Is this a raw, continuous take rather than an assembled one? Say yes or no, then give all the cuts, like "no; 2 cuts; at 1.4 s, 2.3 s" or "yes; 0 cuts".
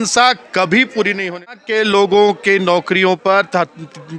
no; 1 cut; at 1.3 s